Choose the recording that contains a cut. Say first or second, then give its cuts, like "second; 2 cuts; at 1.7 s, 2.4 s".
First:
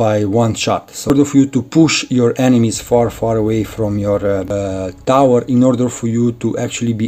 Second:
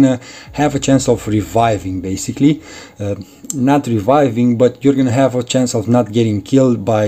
first; 2 cuts; at 1.1 s, 4.5 s